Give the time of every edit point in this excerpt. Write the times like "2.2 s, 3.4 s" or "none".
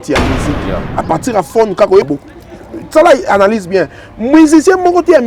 2.1 s